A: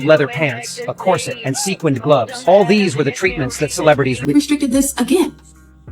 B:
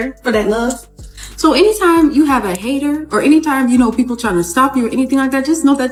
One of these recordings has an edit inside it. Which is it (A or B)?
A